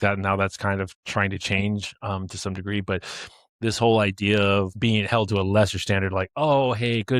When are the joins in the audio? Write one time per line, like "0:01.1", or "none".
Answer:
0:04.7